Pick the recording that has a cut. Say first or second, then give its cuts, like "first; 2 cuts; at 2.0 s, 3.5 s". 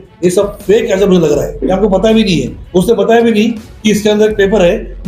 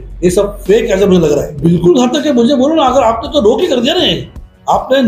first; 1 cut; at 1.5 s